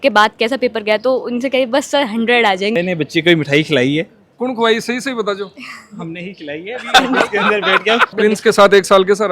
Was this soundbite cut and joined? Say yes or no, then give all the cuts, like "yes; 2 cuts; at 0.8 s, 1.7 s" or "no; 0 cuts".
yes; 2 cuts; at 2.7 s, 8.2 s